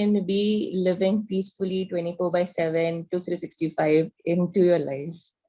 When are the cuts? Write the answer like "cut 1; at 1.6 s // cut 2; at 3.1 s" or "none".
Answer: none

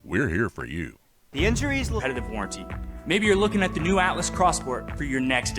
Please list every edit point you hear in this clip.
cut 1; at 2.0 s

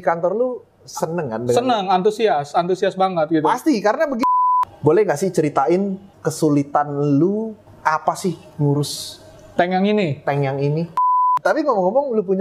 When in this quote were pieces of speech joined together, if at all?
cut 1; at 4.3 s // cut 2; at 11.1 s

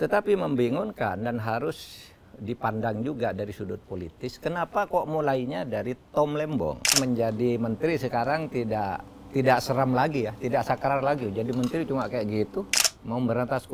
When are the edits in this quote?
cut 1; at 7.0 s // cut 2; at 12.7 s

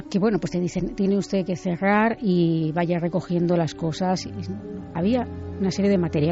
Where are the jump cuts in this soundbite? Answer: none

